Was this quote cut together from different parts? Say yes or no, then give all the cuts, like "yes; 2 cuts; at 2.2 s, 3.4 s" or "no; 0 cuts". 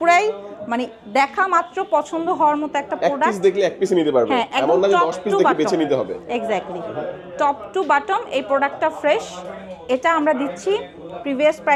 no; 0 cuts